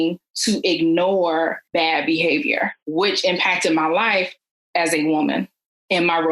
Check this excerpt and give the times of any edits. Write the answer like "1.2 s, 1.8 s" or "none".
1.6 s, 2.8 s